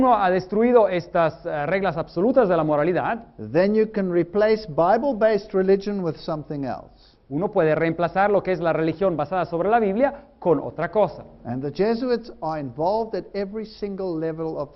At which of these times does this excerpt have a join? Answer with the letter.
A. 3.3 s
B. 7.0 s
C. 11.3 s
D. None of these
C